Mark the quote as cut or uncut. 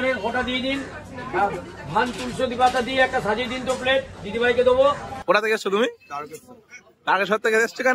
cut